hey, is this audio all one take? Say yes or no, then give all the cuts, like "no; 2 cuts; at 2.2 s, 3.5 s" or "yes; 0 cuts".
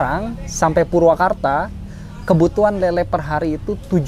yes; 0 cuts